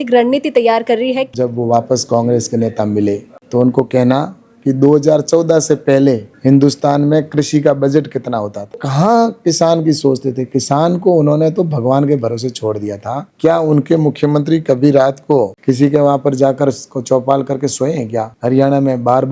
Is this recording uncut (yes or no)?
no